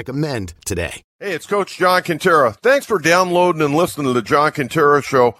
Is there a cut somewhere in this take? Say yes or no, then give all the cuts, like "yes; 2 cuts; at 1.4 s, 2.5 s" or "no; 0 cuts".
yes; 1 cut; at 1.0 s